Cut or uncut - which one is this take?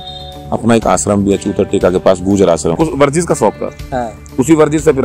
cut